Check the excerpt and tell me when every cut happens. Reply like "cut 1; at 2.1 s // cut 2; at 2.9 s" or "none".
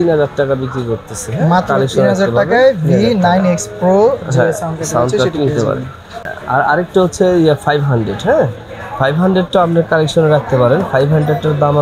none